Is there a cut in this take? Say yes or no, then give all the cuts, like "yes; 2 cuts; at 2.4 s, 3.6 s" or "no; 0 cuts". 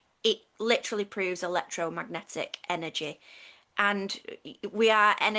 no; 0 cuts